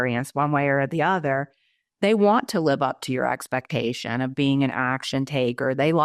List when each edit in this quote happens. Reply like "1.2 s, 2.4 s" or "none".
none